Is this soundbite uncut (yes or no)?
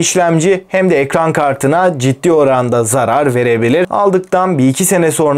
yes